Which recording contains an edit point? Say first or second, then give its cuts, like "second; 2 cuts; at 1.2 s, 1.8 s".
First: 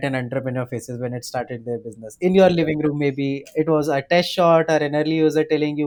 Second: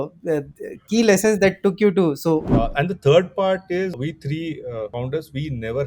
second; 3 cuts; at 2.4 s, 3.9 s, 4.9 s